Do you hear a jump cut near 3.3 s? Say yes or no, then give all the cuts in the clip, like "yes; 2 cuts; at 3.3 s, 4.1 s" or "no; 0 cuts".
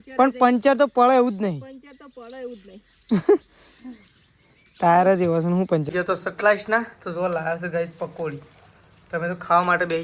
no; 1 cut; at 5.9 s